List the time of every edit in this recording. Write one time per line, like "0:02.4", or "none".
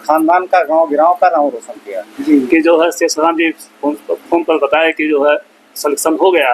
0:02.1